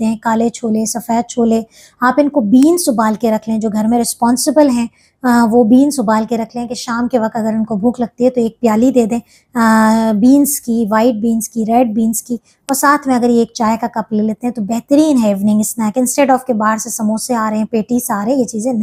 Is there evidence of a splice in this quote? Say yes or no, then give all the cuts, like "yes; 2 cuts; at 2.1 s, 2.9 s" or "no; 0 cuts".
no; 0 cuts